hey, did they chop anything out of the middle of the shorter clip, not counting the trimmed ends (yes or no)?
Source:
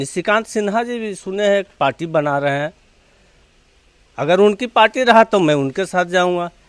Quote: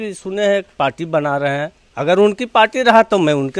yes